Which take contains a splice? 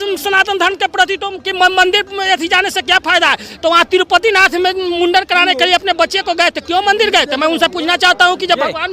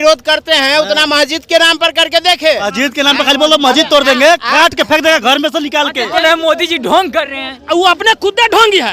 second; 2 cuts; at 2.7 s, 6.2 s

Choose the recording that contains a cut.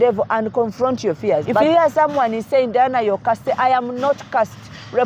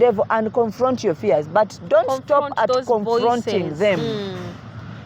first; 1 cut; at 1.6 s

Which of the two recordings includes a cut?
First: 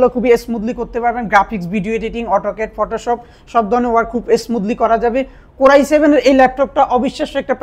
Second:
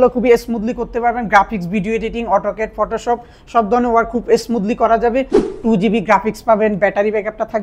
second; 1 cut; at 5.4 s

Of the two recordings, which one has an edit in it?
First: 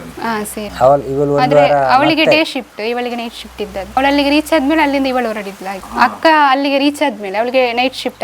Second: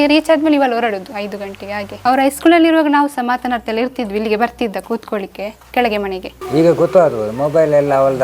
second; 2 cuts; at 1.9 s, 6.3 s

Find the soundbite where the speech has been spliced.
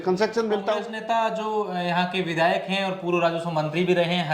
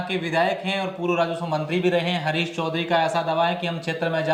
first; 1 cut; at 0.9 s

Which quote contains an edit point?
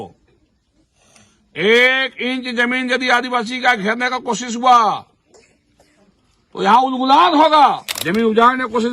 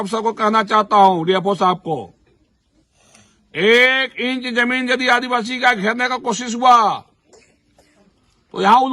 first; 1 cut; at 7.9 s

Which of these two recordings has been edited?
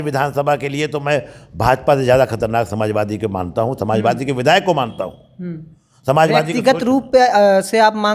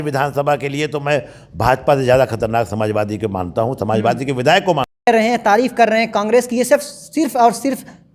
second; 1 cut; at 5.1 s

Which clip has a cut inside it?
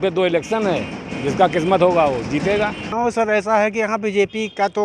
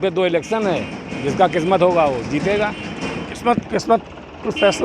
first; 1 cut; at 2.9 s

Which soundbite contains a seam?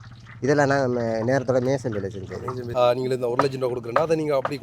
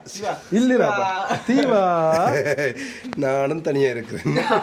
first; 1 cut; at 2.6 s

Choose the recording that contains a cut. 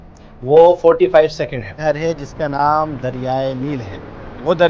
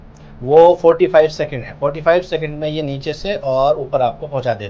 first; 1 cut; at 1.8 s

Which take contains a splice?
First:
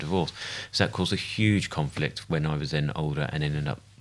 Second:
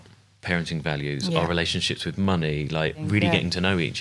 second; 1 cut; at 3.0 s

